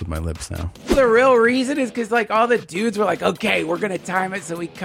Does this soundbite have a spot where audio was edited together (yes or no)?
yes